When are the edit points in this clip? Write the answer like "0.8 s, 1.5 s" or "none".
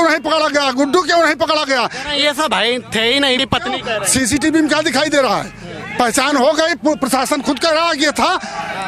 3.4 s